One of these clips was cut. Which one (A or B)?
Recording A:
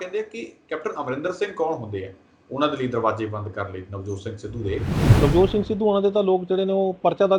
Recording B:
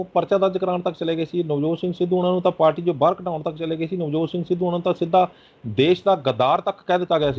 A